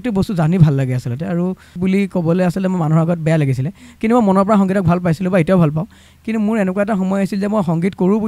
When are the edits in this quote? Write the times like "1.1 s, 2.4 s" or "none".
1.8 s